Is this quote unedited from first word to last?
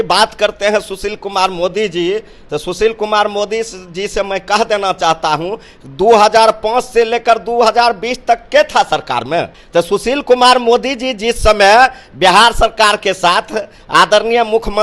no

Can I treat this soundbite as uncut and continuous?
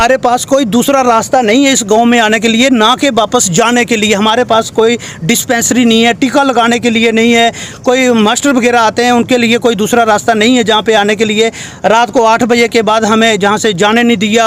yes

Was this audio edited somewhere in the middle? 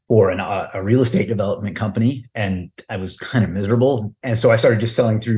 yes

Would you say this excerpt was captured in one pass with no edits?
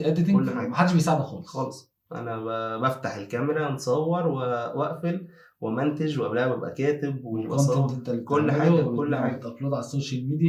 yes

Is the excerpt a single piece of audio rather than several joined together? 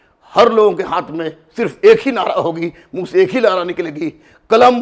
yes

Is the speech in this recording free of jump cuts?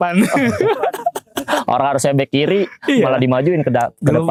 yes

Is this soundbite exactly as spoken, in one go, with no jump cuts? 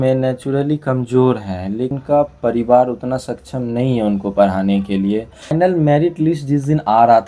no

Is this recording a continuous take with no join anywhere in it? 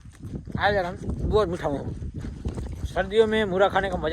yes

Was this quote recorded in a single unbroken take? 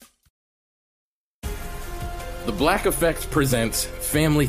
no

